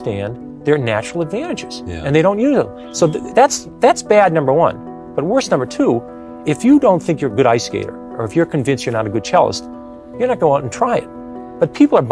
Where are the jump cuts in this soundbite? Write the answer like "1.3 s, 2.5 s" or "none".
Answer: none